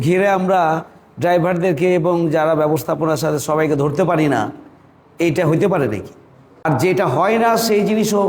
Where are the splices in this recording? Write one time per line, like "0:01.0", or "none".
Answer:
0:06.7